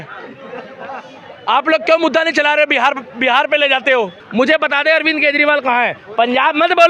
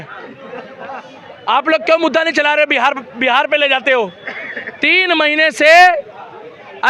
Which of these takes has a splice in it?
first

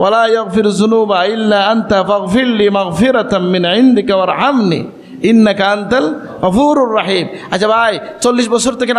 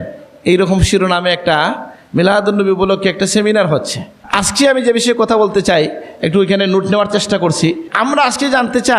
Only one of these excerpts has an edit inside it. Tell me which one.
second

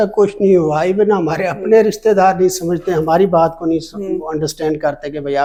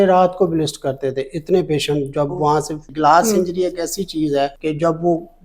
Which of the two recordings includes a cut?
second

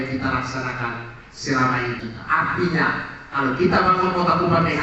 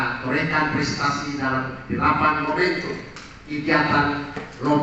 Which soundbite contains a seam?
first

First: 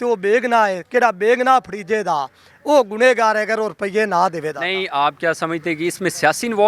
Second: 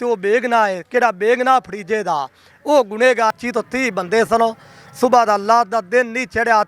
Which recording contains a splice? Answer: second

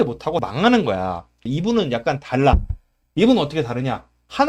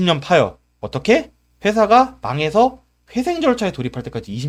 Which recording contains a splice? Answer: first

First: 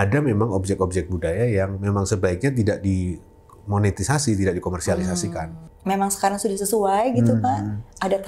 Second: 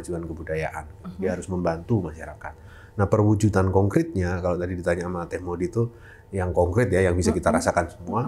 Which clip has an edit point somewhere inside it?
first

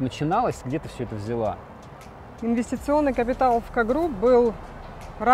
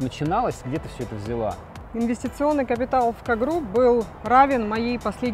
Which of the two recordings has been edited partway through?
second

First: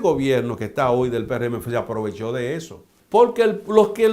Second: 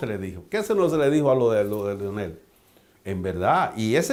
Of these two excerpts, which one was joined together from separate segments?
first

